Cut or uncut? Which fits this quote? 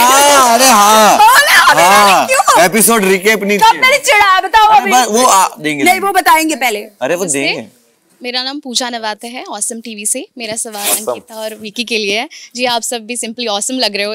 uncut